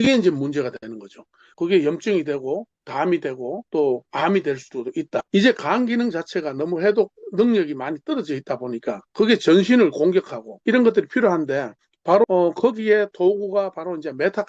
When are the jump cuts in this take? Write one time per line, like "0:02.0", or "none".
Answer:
0:01.5
0:05.3
0:09.0
0:10.4
0:12.2